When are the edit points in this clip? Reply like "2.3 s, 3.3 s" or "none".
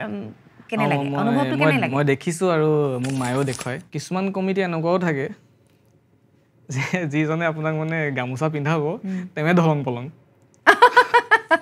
3.8 s